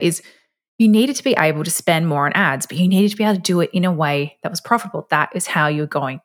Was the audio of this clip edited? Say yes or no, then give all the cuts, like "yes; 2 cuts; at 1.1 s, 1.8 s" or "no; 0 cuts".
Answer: no; 0 cuts